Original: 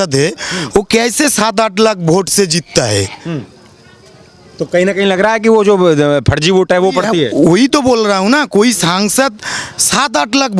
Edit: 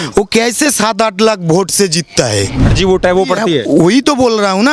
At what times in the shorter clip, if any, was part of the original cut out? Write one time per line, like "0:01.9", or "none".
0:02.7